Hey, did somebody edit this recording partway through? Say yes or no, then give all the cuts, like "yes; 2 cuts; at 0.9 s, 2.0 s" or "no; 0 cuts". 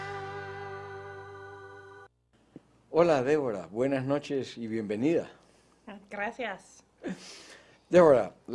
yes; 1 cut; at 1.1 s